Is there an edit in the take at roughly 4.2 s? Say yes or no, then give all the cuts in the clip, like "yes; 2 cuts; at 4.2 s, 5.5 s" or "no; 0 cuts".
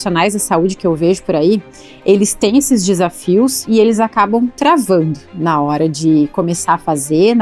no; 0 cuts